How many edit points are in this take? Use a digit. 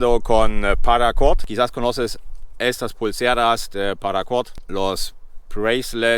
2